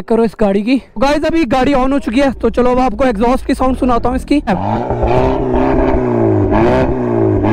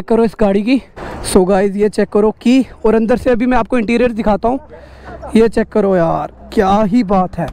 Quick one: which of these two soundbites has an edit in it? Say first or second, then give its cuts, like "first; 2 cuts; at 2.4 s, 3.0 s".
first; 2 cuts; at 1.0 s, 4.5 s